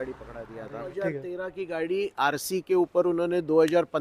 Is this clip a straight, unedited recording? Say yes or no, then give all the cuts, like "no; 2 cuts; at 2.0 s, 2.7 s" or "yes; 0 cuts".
no; 1 cut; at 0.9 s